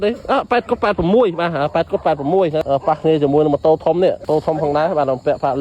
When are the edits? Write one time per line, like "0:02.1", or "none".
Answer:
0:02.6
0:04.2

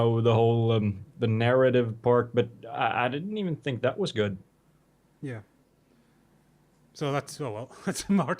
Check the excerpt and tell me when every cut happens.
0:02.1

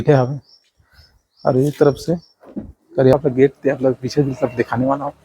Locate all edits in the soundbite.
0:03.1

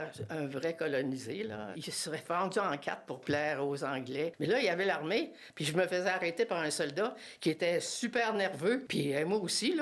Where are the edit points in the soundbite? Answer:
0:01.7
0:04.3
0:08.9

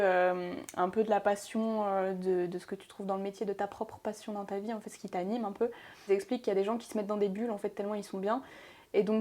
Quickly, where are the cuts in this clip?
0:06.1

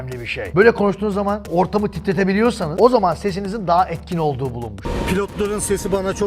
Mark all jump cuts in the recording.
0:01.5
0:02.7
0:04.8

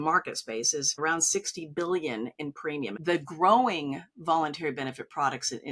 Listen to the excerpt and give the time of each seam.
0:01.0
0:03.0

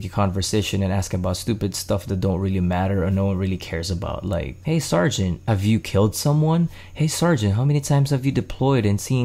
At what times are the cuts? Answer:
0:04.5
0:05.4

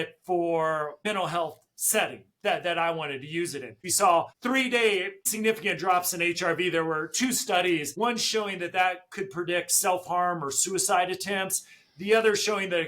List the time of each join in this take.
0:01.0
0:03.8

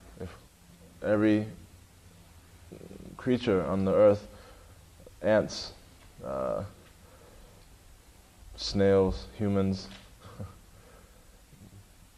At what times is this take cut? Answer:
none

